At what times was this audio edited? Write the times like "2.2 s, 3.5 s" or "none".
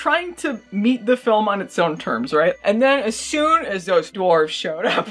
2.6 s, 4.1 s